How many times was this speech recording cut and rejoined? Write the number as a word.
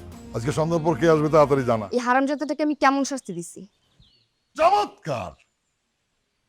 one